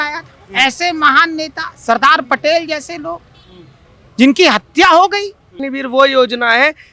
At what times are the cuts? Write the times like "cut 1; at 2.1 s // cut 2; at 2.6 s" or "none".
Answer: cut 1; at 5.6 s